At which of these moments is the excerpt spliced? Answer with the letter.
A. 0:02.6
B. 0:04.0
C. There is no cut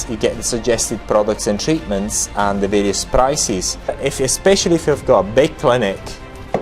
B